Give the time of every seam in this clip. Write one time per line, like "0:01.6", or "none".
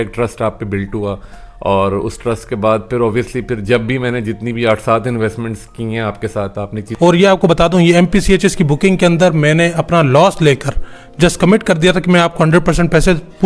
0:06.8